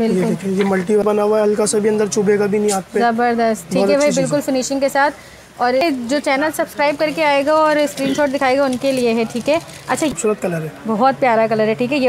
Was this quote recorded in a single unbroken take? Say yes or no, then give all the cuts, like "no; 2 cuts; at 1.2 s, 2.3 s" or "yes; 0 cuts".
no; 3 cuts; at 1.0 s, 5.8 s, 10.1 s